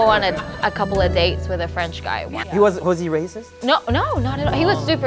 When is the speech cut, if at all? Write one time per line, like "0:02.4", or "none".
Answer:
none